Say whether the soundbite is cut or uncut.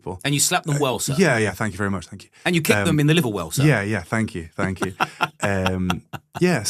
uncut